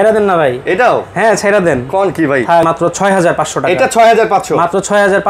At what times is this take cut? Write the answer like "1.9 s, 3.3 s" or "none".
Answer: 2.6 s

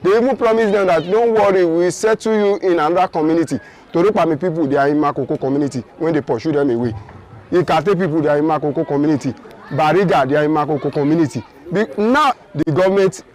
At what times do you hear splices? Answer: 12.4 s

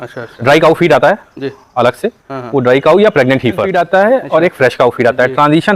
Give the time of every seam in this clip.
3.7 s

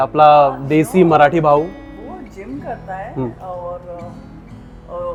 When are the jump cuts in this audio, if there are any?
none

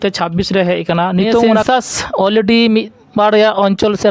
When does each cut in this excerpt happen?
1.6 s

